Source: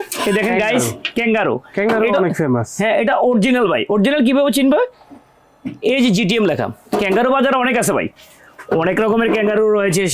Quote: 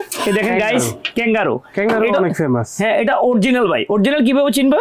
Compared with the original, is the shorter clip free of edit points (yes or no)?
yes